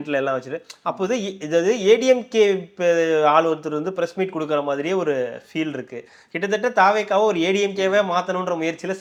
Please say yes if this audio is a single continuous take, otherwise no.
yes